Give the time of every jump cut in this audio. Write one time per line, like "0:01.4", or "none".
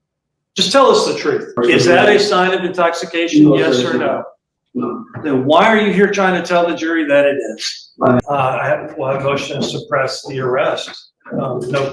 0:01.6
0:08.2